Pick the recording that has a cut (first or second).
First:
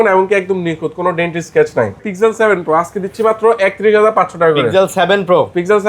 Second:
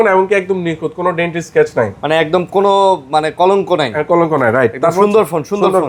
first